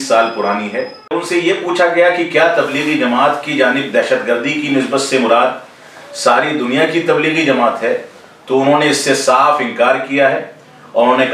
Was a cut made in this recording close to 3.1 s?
no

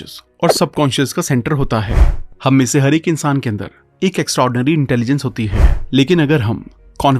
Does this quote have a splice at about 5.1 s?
no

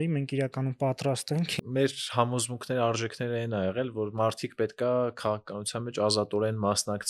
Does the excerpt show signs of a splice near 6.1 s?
no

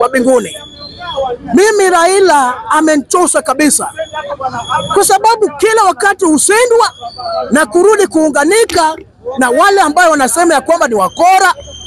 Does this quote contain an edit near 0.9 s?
no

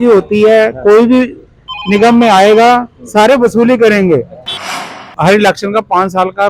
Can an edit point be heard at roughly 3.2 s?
no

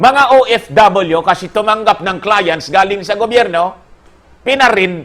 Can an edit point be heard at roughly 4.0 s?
no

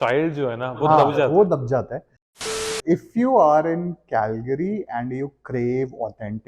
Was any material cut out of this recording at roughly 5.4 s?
no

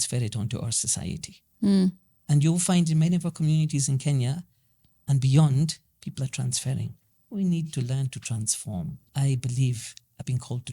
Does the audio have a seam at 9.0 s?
yes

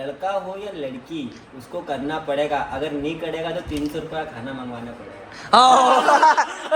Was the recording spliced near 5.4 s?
yes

